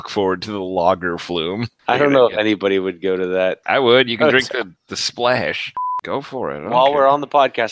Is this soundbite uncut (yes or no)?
no